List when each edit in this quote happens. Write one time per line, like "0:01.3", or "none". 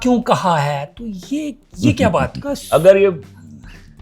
0:02.5